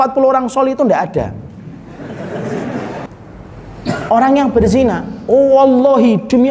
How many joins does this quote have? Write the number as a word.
one